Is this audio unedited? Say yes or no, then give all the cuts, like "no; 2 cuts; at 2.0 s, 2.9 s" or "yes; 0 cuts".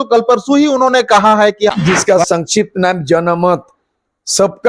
no; 1 cut; at 1.7 s